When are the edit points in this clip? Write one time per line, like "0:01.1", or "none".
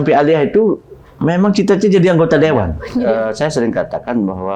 0:02.8